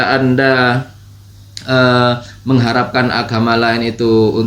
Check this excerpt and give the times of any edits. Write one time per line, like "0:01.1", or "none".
none